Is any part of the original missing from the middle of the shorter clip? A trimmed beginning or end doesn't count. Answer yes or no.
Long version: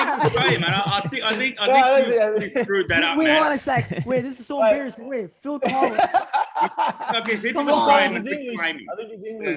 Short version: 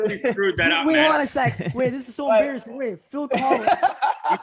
no